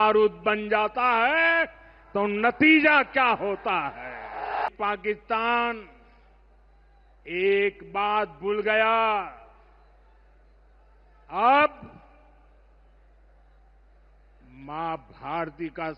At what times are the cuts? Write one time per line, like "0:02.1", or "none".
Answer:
0:04.7